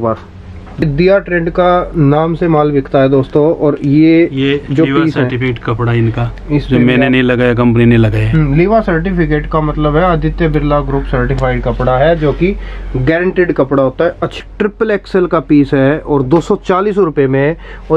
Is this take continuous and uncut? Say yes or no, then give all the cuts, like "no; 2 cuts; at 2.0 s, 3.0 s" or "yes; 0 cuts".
no; 2 cuts; at 0.8 s, 14.3 s